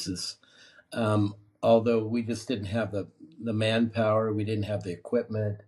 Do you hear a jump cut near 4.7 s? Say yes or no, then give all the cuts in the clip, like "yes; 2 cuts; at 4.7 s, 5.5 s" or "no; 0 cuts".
no; 0 cuts